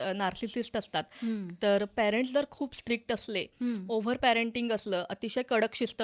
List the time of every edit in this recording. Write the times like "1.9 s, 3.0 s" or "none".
none

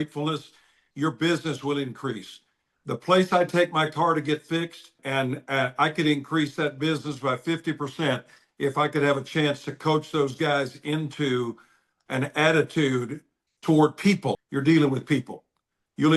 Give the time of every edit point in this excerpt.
5.0 s, 14.4 s

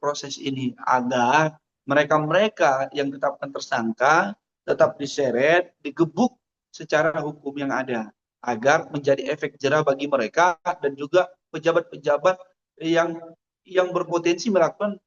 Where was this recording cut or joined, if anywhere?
none

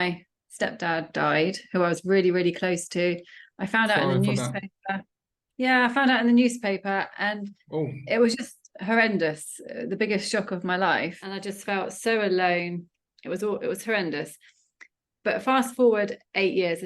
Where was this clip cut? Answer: 11.5 s

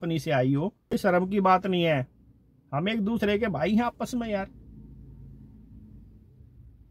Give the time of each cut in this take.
0.9 s

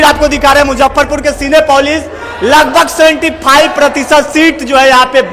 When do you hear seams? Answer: none

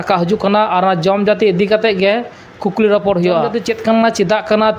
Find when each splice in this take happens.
3.5 s

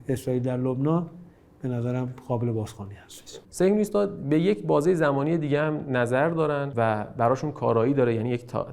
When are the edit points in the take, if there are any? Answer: 3.4 s, 6.7 s

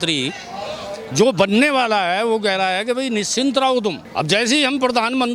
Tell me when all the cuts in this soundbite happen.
4.0 s

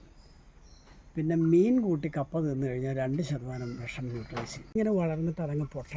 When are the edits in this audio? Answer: 4.7 s

